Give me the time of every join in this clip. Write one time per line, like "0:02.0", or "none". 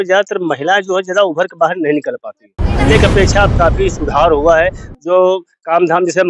0:02.7